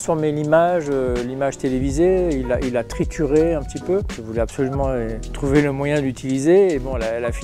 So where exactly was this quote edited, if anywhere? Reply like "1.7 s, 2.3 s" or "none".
4.1 s, 5.2 s